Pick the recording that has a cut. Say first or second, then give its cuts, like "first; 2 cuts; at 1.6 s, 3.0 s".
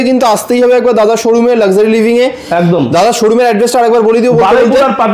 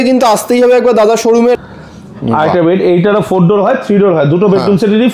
second; 1 cut; at 1.6 s